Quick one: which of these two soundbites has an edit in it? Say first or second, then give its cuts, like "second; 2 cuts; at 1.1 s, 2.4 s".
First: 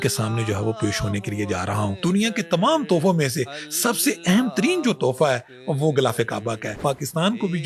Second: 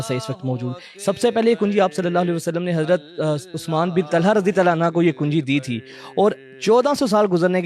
first; 2 cuts; at 1.9 s, 6.8 s